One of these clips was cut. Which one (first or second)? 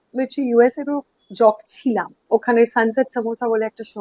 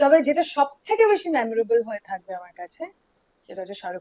first